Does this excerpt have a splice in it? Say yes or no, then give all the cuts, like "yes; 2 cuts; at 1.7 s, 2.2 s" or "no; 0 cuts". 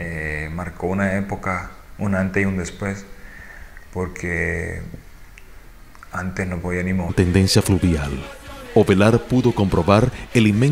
no; 0 cuts